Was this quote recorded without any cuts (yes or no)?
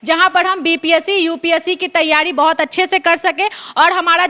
yes